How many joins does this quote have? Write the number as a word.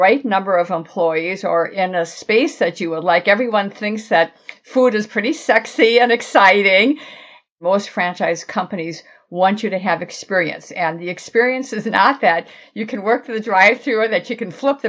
one